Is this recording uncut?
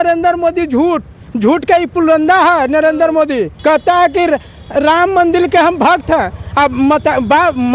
no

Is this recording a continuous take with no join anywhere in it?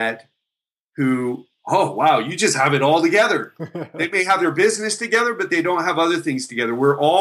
yes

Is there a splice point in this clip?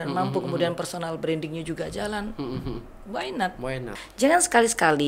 yes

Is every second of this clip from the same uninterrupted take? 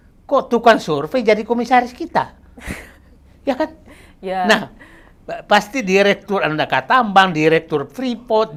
yes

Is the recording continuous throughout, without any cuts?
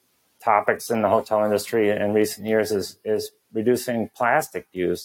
yes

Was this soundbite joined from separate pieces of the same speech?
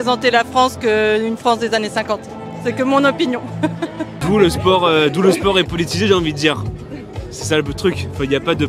no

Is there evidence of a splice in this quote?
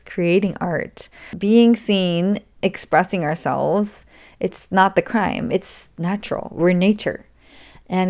yes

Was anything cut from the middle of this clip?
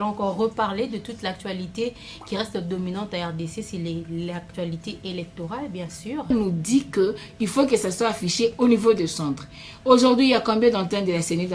yes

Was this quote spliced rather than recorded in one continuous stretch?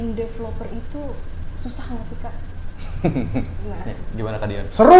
no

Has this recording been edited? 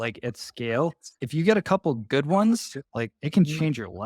yes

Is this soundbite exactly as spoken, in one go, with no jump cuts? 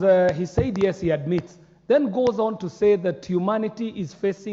yes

